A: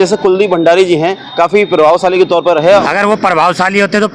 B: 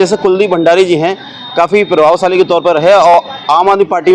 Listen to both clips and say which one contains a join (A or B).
A